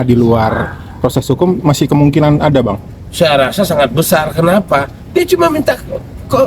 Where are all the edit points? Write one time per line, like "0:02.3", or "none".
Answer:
none